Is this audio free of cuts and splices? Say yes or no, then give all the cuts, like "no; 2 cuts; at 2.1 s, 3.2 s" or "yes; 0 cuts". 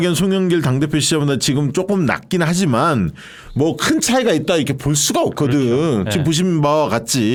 yes; 0 cuts